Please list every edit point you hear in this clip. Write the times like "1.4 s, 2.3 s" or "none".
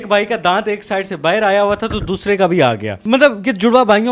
none